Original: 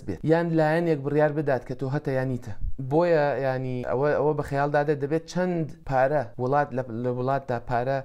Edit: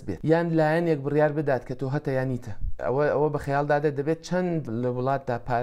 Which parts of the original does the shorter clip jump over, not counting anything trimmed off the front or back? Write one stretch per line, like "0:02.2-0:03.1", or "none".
0:02.7-0:03.8
0:05.7-0:06.9